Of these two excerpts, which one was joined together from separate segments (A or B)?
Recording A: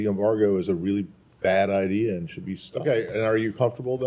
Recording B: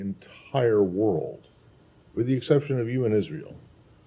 A